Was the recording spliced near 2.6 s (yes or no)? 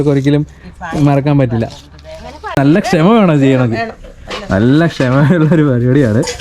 yes